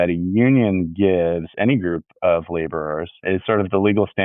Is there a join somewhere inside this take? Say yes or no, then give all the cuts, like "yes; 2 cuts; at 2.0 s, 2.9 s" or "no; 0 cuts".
yes; 1 cut; at 3.2 s